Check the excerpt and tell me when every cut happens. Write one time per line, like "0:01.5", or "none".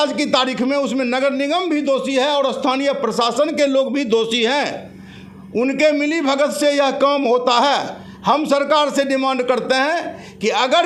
none